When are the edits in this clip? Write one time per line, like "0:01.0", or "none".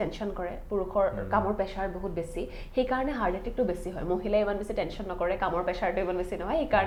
none

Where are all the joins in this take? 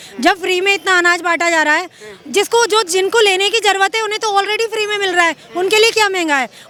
none

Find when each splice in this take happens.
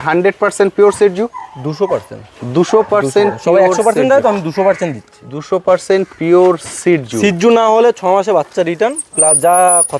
none

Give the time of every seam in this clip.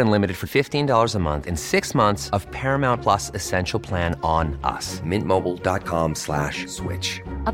none

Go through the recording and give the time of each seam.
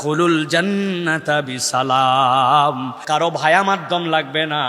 0:03.0

